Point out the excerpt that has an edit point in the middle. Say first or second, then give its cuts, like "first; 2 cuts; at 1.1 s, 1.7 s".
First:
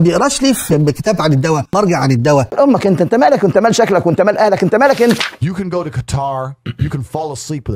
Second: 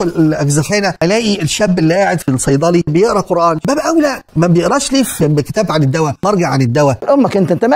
first; 1 cut; at 5.2 s